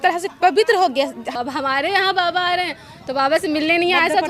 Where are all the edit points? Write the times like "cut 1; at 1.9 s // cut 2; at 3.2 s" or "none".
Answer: cut 1; at 1.3 s